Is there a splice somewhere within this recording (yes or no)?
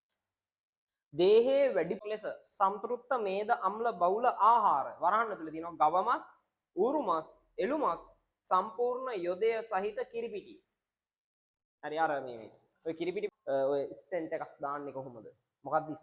yes